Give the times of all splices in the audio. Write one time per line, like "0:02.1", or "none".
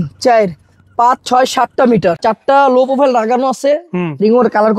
0:02.2